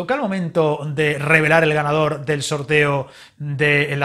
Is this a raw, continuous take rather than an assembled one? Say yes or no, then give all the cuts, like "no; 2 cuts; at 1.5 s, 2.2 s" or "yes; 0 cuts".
yes; 0 cuts